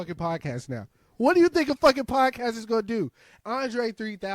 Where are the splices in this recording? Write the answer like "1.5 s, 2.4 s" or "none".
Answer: 3.3 s

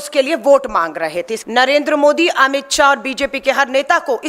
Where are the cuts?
1.4 s

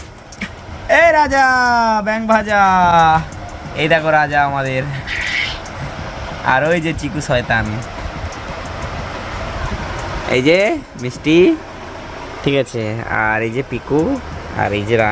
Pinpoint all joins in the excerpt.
none

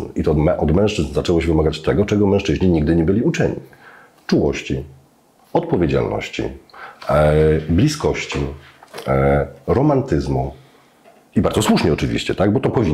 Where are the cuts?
none

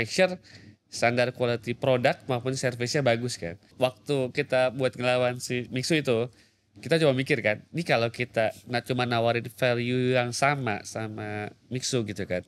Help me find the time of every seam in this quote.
3.7 s

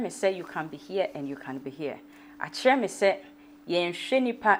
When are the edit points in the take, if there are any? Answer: none

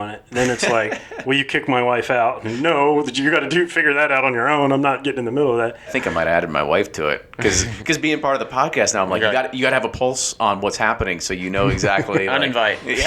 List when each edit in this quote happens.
5.9 s

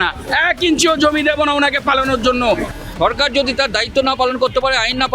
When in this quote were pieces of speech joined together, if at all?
2.7 s

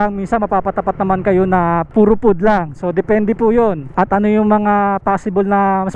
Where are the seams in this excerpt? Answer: 1.9 s, 3.9 s

